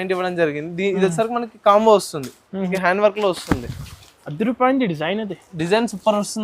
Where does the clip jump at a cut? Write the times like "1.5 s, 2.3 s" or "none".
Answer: 2.7 s